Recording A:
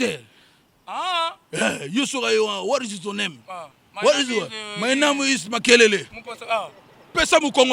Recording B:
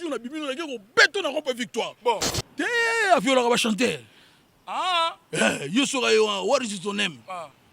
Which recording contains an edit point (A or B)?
B